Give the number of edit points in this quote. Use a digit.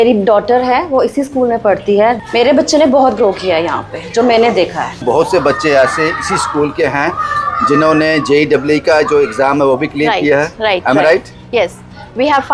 2